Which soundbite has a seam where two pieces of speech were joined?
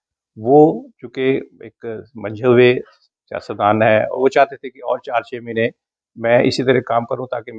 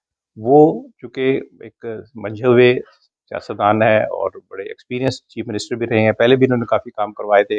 first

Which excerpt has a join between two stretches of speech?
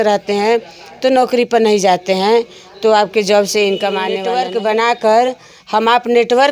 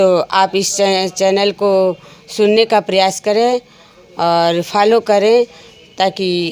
first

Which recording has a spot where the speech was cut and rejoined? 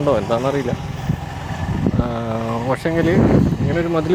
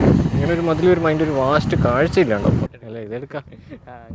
second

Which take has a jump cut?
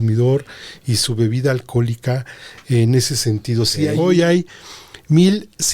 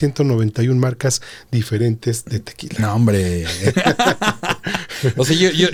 first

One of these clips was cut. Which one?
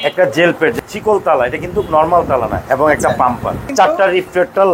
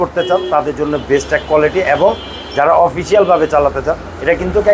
first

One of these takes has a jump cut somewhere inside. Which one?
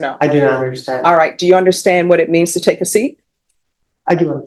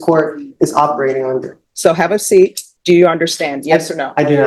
second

